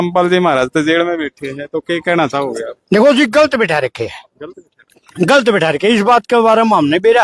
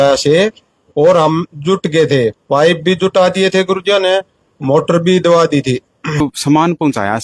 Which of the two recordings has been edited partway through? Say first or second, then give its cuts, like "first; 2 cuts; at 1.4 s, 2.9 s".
second; 1 cut; at 6.2 s